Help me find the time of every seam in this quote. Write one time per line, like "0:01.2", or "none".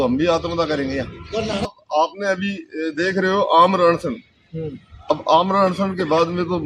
0:01.7